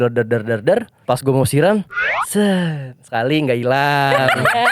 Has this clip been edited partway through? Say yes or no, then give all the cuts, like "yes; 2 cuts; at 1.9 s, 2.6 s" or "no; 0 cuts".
yes; 1 cut; at 0.9 s